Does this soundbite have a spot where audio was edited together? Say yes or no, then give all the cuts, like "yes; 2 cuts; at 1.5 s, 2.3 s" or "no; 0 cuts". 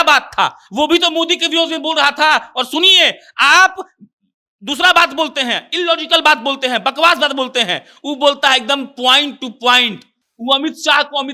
no; 0 cuts